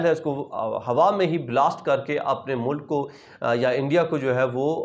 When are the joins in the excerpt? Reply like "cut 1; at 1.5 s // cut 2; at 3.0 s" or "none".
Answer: none